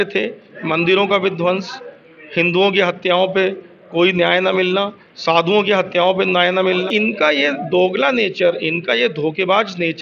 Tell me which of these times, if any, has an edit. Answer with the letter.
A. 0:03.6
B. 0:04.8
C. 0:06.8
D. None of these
C